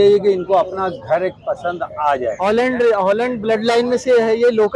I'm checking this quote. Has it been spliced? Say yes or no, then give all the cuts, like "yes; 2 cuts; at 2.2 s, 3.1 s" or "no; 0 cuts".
yes; 1 cut; at 2.4 s